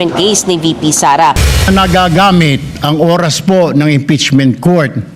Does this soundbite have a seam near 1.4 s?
yes; 1 cut; at 1.4 s

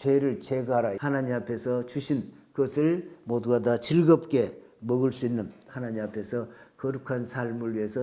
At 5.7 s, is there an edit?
yes; 2 cuts; at 1.0 s, 5.7 s

